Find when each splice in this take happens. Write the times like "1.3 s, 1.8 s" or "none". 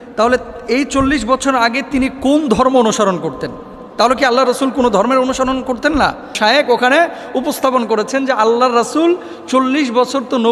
6.4 s